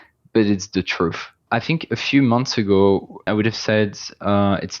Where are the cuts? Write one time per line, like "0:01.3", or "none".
0:01.4
0:03.3